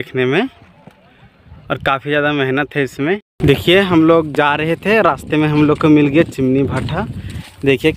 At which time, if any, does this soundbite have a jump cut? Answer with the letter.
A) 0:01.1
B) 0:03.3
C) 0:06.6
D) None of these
B